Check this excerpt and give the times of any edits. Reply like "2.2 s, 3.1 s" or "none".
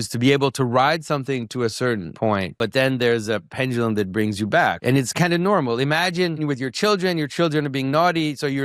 2.6 s, 4.8 s, 6.4 s